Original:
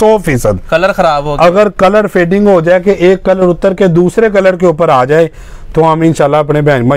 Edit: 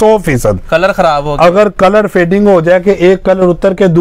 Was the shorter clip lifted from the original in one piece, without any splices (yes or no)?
yes